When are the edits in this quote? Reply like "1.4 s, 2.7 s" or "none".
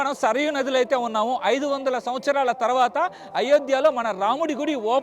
none